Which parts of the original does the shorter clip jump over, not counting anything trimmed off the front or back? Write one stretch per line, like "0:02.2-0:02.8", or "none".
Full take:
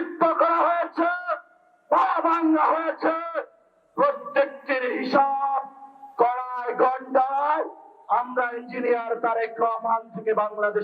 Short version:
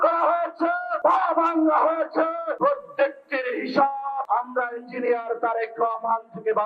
0:01.3-0:01.8
0:03.4-0:03.9
0:05.6-0:08.1